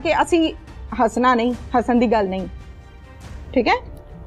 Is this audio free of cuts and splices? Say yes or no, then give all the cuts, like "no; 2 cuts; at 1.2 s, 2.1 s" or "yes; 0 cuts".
yes; 0 cuts